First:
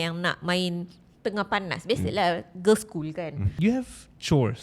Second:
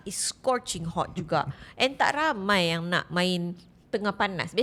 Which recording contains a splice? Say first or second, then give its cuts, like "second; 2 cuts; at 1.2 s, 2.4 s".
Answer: first; 1 cut; at 3.4 s